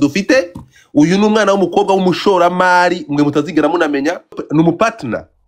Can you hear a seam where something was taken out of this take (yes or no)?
yes